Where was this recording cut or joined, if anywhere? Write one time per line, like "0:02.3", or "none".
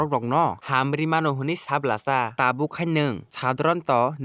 none